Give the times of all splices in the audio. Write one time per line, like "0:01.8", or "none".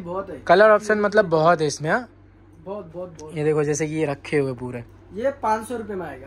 none